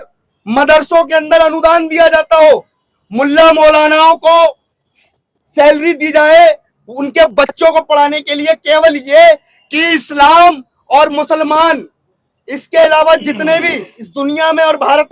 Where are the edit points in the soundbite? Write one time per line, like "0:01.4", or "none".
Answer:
none

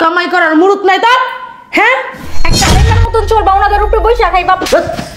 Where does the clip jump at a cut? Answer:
0:02.7

